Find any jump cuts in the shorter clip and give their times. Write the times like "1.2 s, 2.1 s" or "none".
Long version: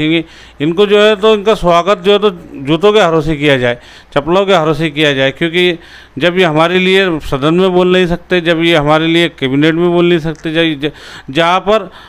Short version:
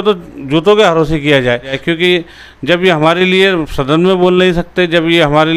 1.8 s